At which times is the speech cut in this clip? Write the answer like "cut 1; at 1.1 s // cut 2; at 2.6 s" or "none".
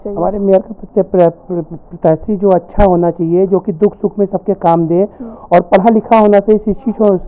none